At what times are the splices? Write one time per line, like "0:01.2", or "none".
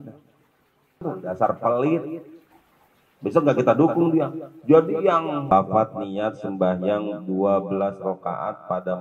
0:01.0
0:05.5